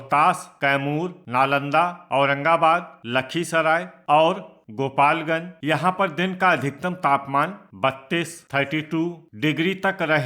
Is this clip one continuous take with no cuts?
no; 3 cuts; at 1.0 s, 3.9 s, 5.5 s

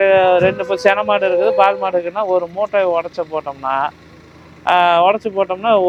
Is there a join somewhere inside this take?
no; 0 cuts

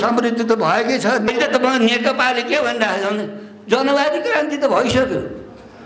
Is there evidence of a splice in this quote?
yes; 1 cut; at 1.3 s

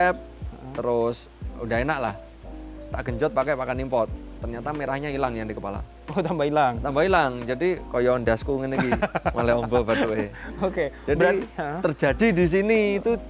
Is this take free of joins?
yes; 0 cuts

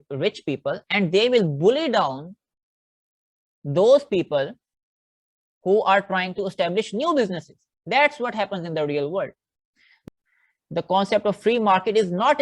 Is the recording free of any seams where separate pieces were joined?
no; 1 cut; at 10.0 s

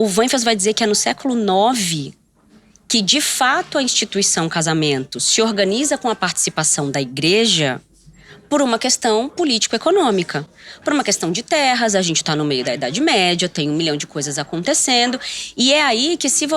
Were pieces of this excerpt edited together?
no; 0 cuts

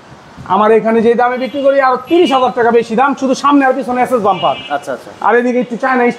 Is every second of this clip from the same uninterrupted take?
yes; 0 cuts

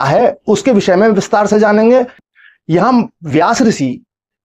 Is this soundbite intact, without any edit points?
no; 1 cut; at 2.2 s

